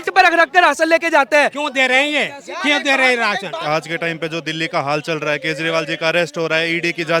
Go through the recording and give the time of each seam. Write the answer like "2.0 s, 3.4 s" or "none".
1.5 s, 3.6 s